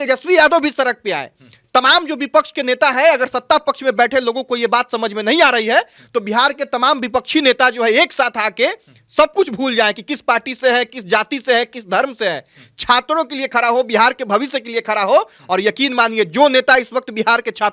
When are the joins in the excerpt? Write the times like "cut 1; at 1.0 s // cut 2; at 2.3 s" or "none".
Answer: none